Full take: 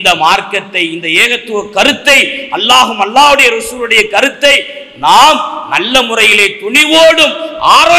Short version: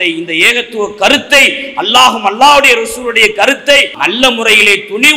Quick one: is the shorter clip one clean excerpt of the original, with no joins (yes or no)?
no